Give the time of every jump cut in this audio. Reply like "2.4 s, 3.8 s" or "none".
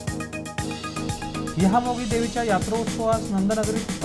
1.3 s